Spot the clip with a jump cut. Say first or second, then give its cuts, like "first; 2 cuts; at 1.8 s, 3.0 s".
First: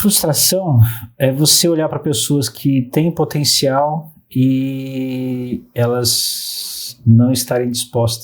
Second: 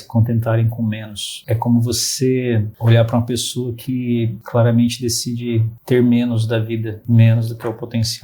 second; 5 cuts; at 1.4 s, 2.7 s, 4.4 s, 5.7 s, 7.0 s